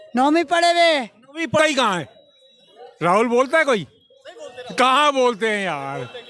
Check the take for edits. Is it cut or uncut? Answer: cut